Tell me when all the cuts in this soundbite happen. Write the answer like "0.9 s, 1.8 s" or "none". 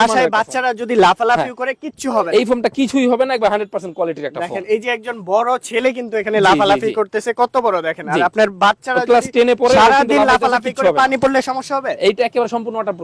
none